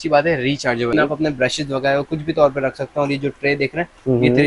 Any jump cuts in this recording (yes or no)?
yes